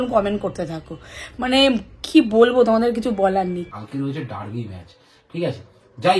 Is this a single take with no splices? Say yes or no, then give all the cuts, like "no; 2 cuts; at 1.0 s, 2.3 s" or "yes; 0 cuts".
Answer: no; 1 cut; at 3.7 s